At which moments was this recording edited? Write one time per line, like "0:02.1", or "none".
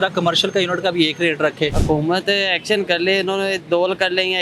0:01.8